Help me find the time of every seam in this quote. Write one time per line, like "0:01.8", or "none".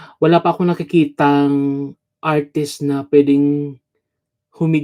none